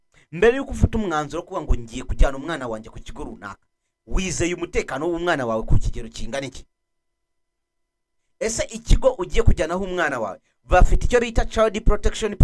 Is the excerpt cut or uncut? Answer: uncut